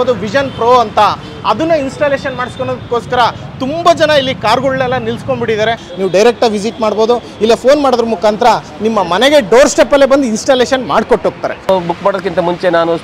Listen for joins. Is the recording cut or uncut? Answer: cut